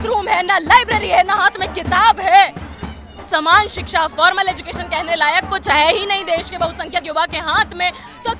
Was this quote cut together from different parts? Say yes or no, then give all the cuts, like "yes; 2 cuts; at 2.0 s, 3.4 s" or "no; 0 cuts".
no; 0 cuts